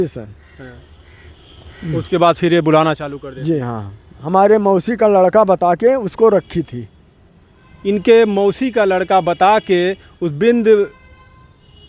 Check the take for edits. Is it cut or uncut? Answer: cut